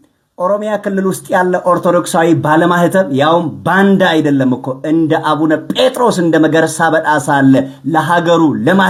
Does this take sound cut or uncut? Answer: uncut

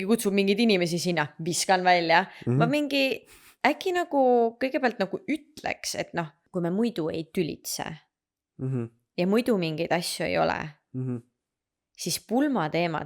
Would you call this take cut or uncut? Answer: cut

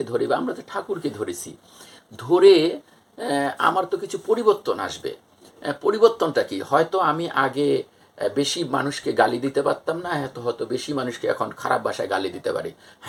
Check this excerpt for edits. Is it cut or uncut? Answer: uncut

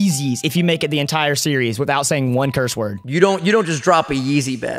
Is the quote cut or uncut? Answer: cut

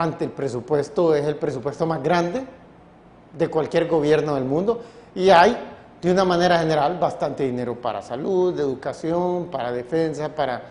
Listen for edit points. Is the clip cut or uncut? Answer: uncut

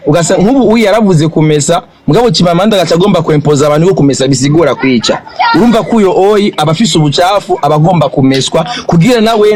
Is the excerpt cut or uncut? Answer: uncut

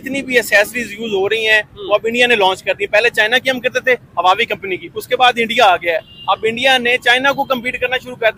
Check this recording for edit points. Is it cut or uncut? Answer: uncut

